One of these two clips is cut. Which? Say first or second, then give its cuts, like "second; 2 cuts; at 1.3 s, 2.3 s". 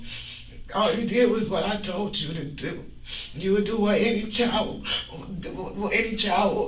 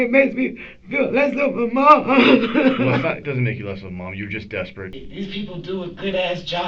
second; 1 cut; at 5.0 s